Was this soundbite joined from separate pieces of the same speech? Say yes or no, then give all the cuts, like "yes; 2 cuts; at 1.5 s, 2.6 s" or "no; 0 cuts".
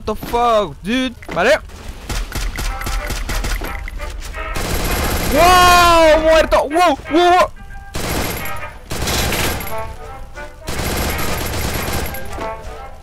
yes; 1 cut; at 1.2 s